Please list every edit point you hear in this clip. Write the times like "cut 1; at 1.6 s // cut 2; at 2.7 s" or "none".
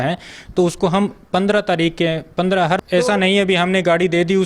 cut 1; at 2.8 s